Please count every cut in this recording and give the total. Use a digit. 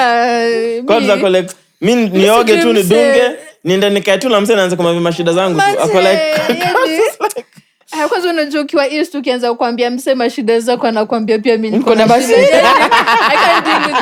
0